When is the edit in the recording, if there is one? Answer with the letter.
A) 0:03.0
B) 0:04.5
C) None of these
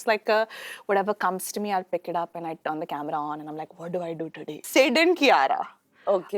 B